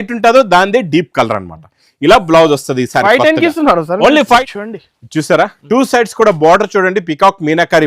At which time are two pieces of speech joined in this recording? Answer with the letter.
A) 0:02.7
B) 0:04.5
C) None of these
B